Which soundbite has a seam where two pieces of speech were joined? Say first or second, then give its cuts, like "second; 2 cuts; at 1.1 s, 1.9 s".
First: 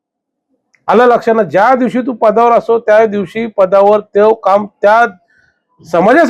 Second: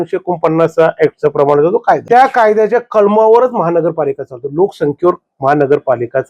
second; 1 cut; at 2.0 s